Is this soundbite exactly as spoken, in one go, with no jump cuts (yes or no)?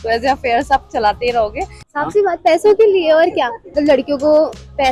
no